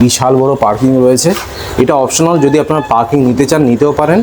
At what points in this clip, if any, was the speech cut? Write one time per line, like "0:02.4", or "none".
none